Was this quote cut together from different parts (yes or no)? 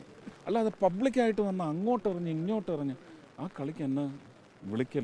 no